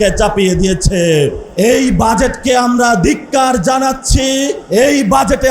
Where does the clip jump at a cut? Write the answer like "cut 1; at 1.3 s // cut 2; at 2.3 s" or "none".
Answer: cut 1; at 1.4 s // cut 2; at 4.6 s